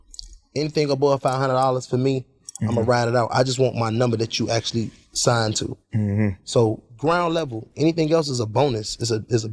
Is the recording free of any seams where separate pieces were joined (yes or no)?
no